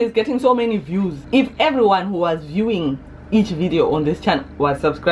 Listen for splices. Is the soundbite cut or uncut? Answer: cut